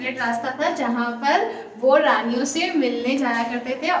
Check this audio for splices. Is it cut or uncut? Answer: uncut